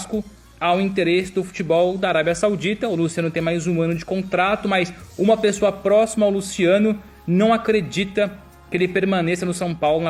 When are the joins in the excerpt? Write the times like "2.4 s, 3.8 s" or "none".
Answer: none